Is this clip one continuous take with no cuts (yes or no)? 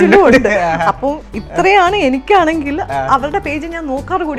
yes